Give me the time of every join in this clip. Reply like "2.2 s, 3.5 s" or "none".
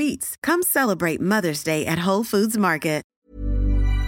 3.1 s